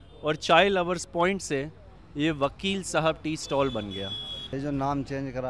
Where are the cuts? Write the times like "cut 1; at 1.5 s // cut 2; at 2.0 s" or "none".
cut 1; at 4.5 s

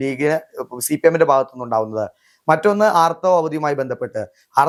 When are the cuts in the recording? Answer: none

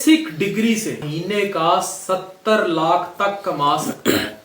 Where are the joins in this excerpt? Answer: cut 1; at 1.0 s

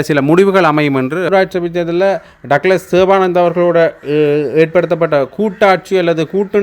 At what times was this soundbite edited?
cut 1; at 1.3 s

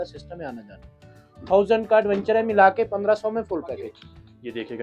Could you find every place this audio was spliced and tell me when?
cut 1; at 3.9 s

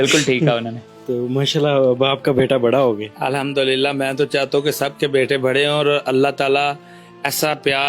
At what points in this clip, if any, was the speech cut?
none

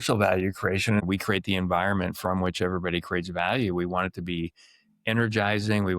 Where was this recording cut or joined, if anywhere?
cut 1; at 1.0 s

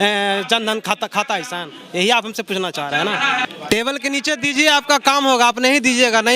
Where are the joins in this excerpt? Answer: cut 1; at 3.5 s

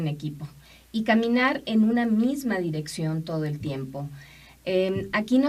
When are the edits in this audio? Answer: none

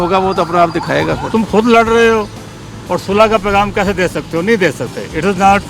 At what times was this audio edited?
cut 1; at 1.2 s

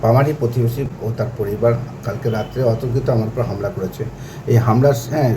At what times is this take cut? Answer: cut 1; at 0.9 s

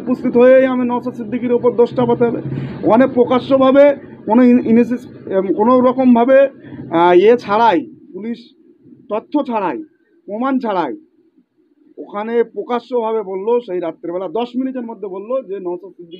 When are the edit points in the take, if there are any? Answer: none

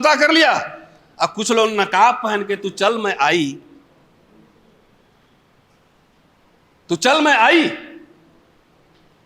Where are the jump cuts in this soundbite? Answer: none

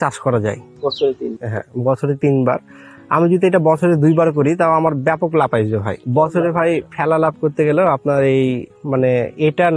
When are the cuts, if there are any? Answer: cut 1; at 6.0 s

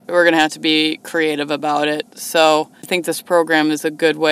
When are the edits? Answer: cut 1; at 2.9 s

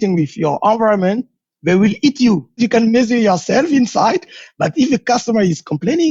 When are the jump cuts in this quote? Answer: cut 1; at 2.6 s

